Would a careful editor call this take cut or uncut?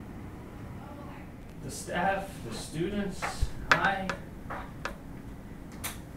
cut